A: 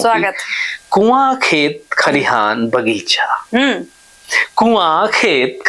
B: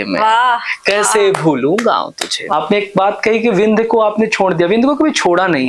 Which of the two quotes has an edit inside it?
B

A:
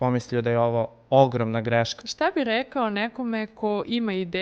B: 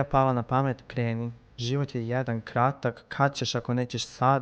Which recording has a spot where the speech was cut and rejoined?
A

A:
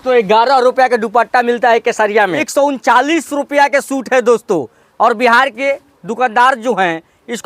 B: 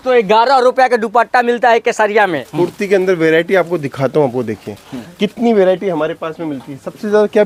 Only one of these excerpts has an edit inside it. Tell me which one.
A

